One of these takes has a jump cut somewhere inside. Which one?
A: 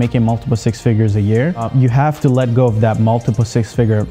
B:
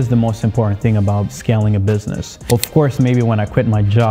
B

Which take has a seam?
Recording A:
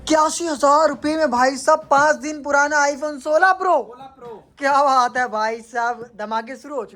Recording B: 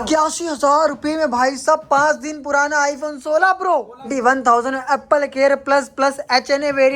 B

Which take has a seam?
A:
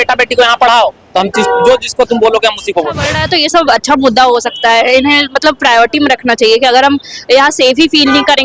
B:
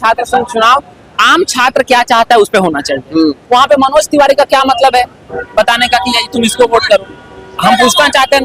A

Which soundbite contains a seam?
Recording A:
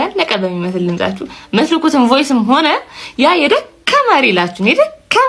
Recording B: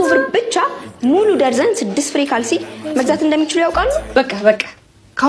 B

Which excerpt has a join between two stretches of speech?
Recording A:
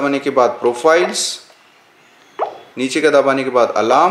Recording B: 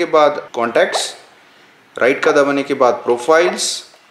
A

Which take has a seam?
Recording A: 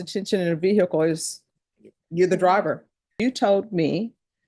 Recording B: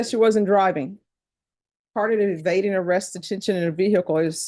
A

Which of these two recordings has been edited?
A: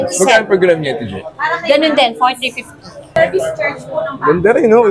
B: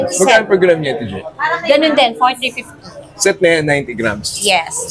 A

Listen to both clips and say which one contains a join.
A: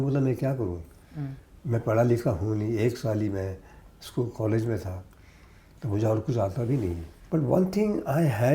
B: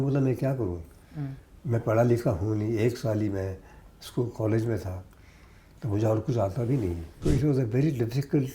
B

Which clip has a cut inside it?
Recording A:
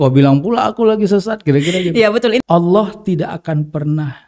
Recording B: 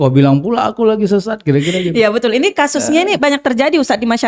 A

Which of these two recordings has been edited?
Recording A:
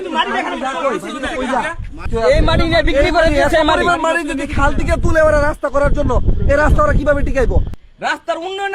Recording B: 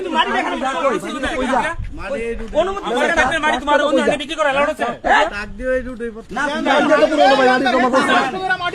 A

